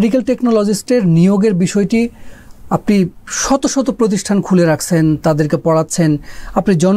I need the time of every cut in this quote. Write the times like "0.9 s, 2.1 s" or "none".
none